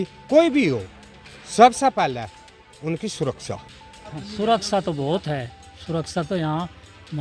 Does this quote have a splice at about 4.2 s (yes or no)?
yes